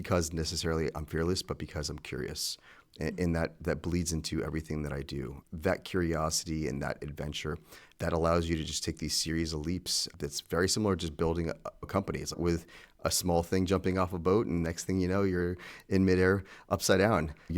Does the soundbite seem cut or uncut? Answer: cut